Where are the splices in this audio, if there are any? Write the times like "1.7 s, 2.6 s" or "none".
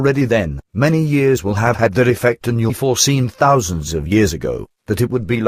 none